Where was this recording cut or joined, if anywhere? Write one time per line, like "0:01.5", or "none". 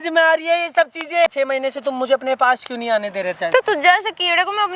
0:01.3